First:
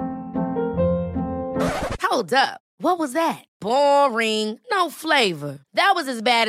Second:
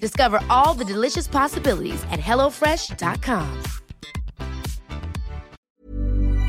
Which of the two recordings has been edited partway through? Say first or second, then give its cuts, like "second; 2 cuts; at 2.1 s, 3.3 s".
second; 1 cut; at 5.6 s